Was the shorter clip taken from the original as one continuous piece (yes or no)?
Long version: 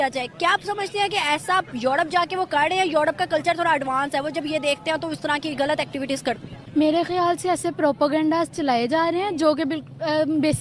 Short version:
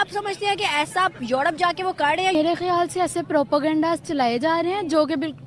no